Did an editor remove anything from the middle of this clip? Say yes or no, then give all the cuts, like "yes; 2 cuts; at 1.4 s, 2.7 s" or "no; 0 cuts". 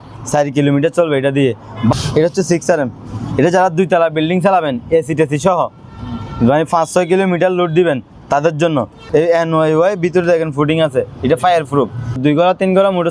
yes; 3 cuts; at 1.9 s, 9.0 s, 12.2 s